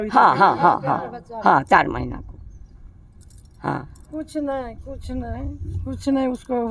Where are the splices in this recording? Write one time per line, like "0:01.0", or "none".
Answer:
none

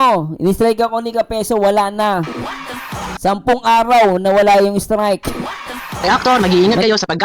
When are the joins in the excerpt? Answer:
0:06.0

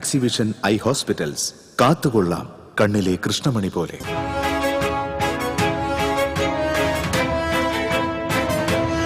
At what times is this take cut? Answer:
0:04.0

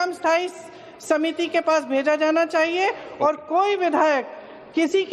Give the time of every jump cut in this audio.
0:02.5

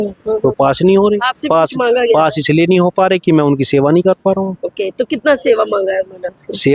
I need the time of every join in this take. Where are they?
none

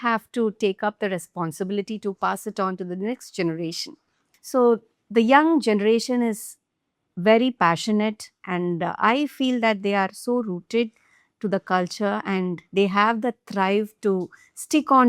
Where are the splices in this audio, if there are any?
none

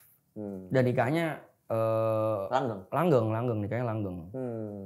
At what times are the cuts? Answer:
none

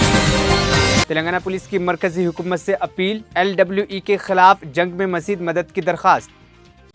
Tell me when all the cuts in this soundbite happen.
none

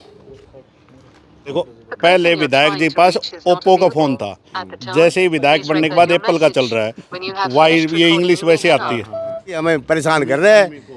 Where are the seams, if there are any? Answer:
0:01.5
0:09.6

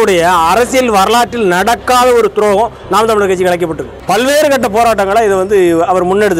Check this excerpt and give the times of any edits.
0:03.9

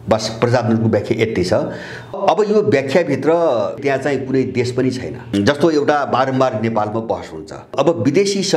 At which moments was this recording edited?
0:02.2
0:03.8
0:05.3
0:07.7

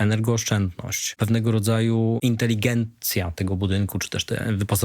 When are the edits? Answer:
0:01.1
0:02.2

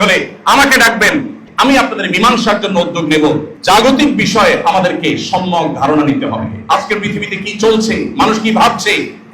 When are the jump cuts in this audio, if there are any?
0:01.4
0:03.5

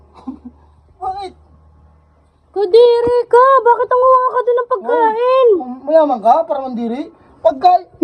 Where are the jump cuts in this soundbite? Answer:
none

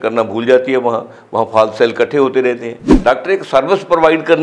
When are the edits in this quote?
0:02.9

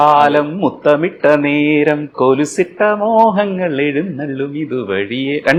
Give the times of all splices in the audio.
none

